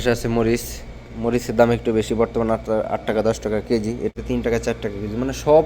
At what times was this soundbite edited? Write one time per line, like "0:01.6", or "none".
0:04.1